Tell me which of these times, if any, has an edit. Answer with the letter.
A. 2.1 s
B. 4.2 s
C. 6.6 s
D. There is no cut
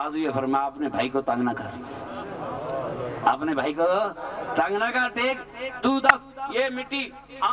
B